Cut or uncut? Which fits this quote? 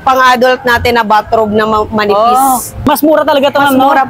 cut